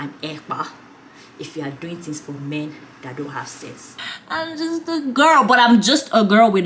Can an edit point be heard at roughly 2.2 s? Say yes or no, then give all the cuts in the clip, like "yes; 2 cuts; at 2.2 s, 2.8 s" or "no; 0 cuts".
no; 1 cut; at 4.0 s